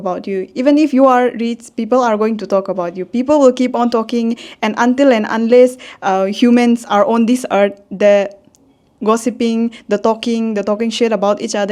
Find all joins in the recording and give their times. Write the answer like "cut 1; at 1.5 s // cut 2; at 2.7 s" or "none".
none